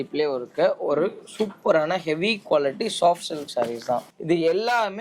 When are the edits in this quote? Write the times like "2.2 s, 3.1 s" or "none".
4.1 s